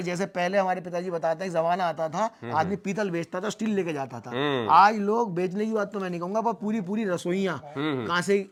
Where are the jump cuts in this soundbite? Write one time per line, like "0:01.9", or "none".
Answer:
none